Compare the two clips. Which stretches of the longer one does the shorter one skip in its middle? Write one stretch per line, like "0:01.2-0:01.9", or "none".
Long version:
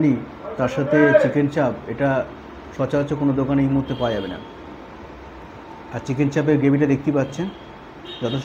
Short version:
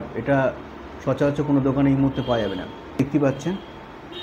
0:04.7-0:06.9